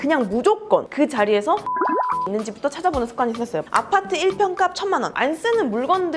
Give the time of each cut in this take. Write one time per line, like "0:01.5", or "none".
0:01.9
0:03.7